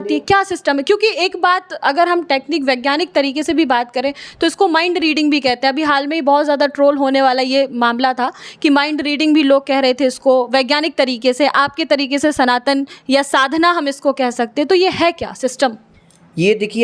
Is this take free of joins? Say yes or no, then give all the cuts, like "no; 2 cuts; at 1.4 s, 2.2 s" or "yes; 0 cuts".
yes; 0 cuts